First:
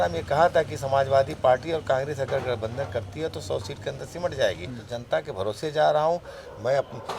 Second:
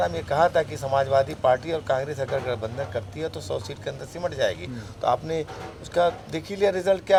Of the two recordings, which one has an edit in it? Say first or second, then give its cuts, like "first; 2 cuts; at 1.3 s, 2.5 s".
first; 1 cut; at 4.8 s